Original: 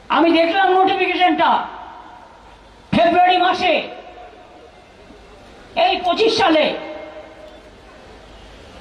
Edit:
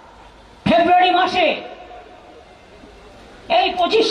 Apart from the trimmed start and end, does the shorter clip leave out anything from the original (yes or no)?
no